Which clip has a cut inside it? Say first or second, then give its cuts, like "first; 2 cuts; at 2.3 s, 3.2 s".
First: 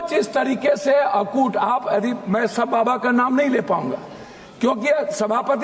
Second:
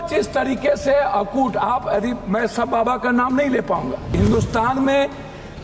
second; 1 cut; at 4.2 s